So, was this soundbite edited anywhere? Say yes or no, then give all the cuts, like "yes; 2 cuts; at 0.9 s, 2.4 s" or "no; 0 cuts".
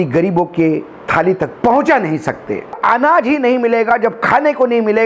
yes; 1 cut; at 2.8 s